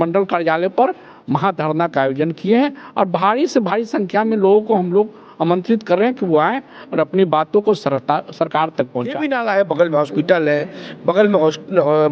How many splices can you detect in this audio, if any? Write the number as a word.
one